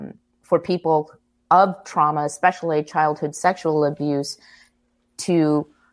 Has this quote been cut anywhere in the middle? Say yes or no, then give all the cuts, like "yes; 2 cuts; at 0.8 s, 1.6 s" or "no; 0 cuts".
no; 0 cuts